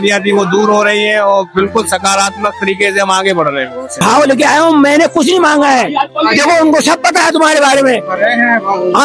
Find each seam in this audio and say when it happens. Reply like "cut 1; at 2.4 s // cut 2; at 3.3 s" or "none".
cut 1; at 4.0 s